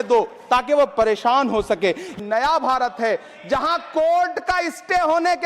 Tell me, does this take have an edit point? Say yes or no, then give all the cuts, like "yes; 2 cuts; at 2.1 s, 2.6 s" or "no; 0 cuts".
yes; 1 cut; at 2.2 s